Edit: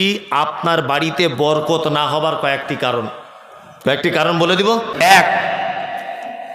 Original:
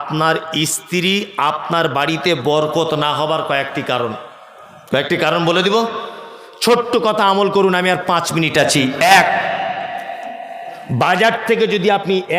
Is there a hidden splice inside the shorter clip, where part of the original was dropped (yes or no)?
yes